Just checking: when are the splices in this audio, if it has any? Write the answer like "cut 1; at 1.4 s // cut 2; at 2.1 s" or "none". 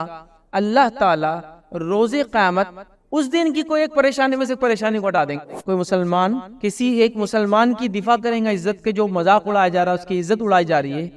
cut 1; at 5.5 s // cut 2; at 6.5 s